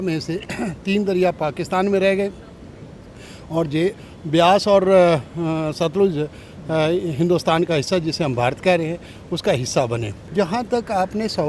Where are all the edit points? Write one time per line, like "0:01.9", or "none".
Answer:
0:10.2